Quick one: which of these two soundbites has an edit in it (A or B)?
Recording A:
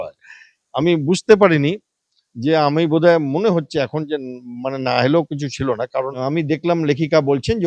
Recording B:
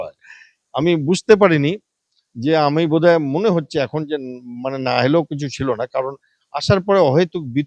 A